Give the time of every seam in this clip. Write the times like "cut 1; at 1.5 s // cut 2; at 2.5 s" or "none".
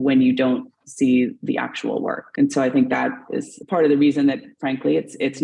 cut 1; at 3.5 s